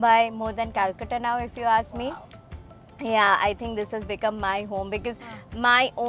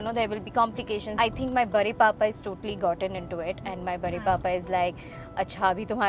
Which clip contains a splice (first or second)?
second